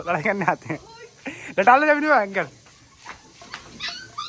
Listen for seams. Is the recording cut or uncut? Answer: uncut